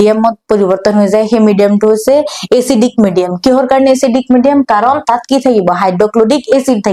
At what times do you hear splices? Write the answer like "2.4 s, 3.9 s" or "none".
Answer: none